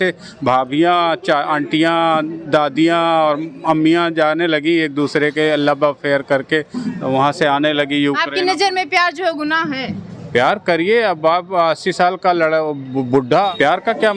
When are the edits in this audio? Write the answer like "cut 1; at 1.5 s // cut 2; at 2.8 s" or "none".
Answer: cut 1; at 13.3 s